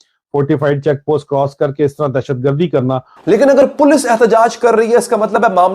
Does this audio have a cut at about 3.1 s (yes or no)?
yes